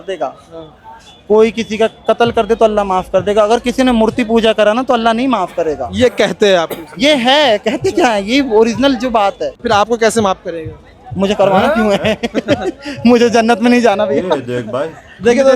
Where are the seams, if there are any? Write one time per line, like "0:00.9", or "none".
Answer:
0:09.5